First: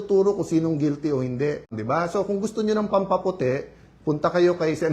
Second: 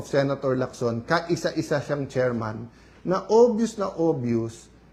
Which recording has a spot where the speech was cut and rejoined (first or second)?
first